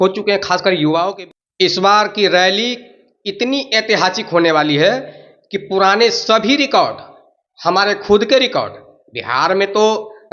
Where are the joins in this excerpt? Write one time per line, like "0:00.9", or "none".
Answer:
0:01.1